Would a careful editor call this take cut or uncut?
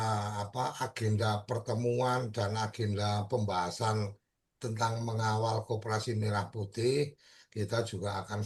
uncut